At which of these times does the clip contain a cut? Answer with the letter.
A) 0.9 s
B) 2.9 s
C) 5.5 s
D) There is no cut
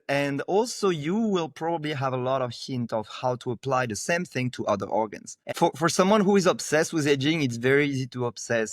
C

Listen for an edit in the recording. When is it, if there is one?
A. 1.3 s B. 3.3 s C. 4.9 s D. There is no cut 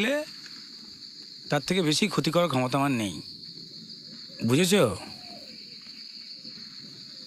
D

